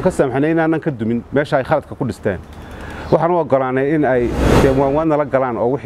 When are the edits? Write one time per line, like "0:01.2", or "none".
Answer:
0:04.4